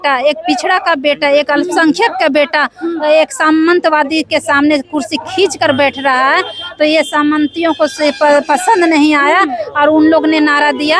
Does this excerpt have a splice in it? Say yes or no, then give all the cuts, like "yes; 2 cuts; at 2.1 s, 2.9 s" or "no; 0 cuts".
no; 0 cuts